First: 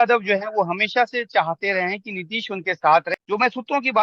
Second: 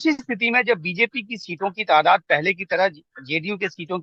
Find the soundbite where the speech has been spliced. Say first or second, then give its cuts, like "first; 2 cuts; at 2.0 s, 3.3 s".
first; 1 cut; at 3.1 s